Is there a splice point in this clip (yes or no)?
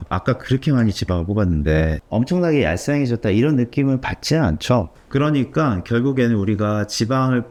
no